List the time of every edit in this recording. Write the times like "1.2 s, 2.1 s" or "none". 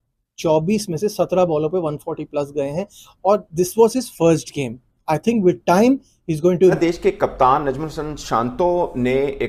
none